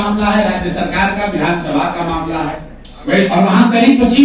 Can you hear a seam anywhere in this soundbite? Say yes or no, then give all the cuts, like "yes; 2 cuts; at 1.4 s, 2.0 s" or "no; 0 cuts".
yes; 1 cut; at 3.3 s